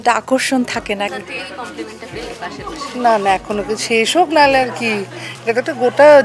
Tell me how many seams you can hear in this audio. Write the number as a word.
one